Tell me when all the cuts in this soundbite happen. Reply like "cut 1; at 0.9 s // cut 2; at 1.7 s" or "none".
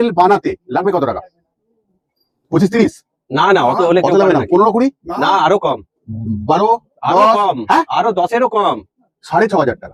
none